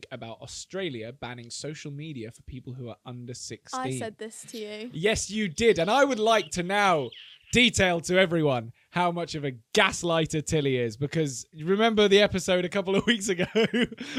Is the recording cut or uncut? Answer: uncut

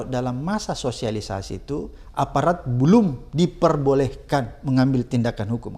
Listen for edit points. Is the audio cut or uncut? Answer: uncut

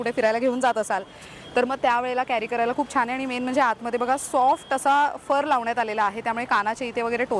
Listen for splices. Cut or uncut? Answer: uncut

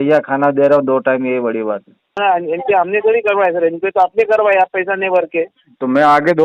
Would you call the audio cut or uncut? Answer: cut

